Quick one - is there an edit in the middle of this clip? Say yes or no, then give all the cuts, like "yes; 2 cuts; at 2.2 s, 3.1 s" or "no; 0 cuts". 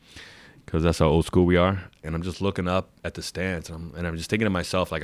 yes; 1 cut; at 2.0 s